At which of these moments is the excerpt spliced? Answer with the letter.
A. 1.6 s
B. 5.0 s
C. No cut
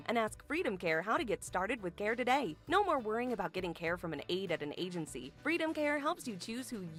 C